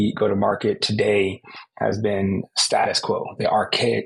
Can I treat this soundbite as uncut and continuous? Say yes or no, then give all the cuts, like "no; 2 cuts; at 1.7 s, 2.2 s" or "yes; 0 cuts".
yes; 0 cuts